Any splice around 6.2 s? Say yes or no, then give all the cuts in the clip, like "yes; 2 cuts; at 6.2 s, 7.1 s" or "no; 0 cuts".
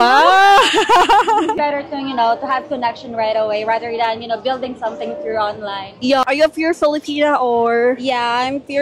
yes; 2 cuts; at 1.6 s, 6.2 s